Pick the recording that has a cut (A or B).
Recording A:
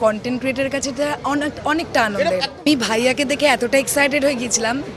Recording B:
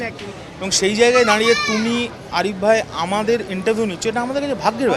A